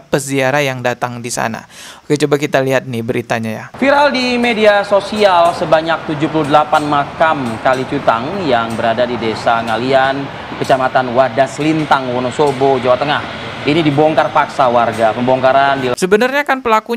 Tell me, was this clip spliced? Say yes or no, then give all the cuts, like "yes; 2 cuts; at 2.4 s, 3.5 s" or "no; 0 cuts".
yes; 1 cut; at 15.9 s